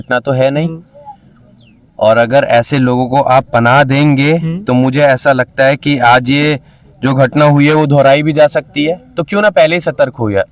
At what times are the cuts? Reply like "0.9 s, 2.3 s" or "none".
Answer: none